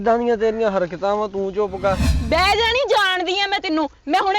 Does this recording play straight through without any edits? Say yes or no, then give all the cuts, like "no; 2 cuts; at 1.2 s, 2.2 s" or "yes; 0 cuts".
no; 1 cut; at 2.1 s